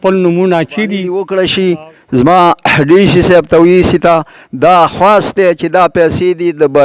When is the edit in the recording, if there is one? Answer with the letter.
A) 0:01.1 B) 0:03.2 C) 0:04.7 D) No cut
A